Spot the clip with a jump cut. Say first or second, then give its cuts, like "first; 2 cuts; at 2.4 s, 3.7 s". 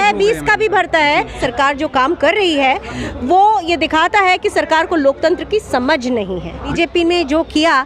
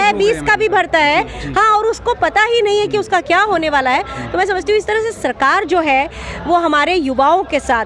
first; 2 cuts; at 1.4 s, 6.7 s